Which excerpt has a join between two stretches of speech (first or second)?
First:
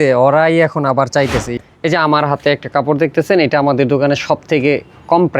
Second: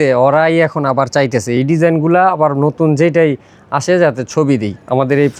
first